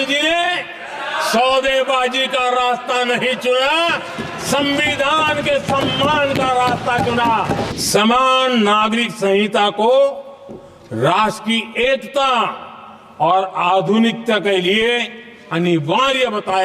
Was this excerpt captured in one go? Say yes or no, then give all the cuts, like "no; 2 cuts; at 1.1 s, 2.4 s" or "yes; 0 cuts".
no; 1 cut; at 7.7 s